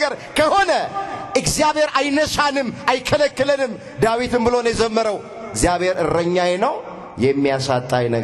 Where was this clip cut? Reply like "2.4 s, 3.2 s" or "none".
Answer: none

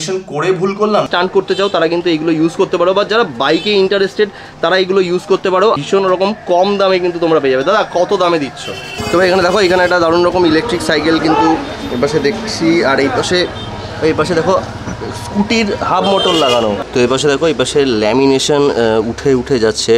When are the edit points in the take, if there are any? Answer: 1.1 s, 5.8 s, 9.0 s, 16.8 s

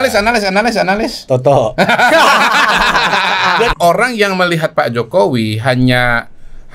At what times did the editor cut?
3.7 s

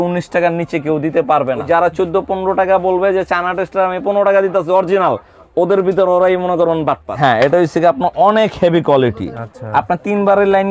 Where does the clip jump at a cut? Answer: 1.6 s, 7.1 s

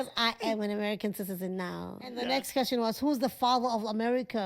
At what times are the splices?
2.1 s

